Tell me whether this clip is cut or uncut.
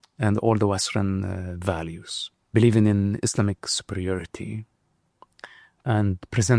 cut